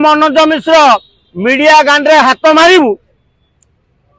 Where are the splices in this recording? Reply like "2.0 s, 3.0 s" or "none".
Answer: none